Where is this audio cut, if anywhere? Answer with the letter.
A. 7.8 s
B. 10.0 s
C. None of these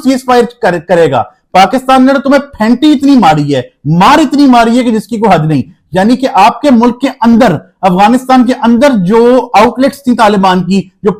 C